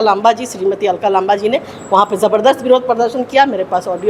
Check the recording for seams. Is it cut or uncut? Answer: uncut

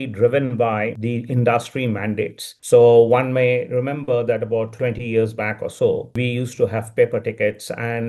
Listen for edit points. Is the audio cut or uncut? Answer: uncut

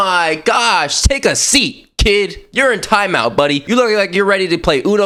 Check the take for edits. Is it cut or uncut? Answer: uncut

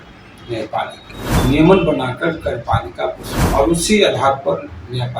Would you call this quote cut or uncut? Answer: cut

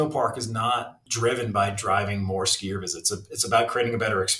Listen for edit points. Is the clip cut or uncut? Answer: uncut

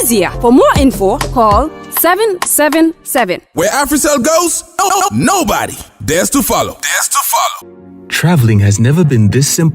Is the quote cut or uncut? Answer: cut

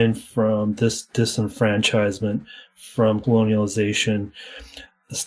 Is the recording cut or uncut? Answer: cut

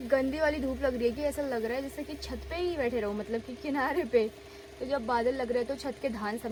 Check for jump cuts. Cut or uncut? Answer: uncut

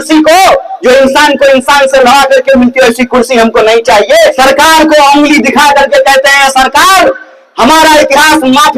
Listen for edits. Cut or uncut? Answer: cut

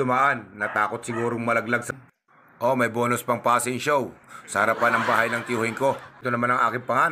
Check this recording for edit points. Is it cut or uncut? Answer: cut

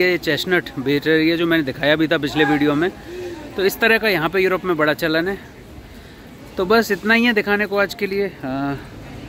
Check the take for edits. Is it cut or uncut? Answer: uncut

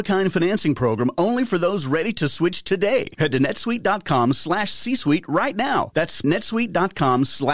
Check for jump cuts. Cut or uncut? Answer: cut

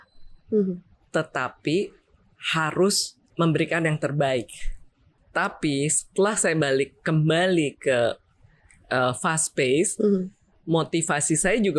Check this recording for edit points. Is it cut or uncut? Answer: cut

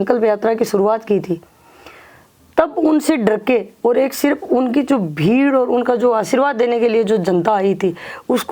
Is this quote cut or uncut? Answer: uncut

